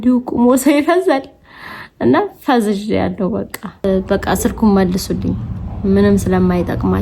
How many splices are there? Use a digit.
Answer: 1